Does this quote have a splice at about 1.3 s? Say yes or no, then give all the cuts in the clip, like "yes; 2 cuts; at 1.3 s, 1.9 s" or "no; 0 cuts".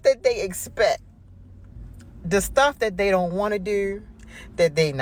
no; 0 cuts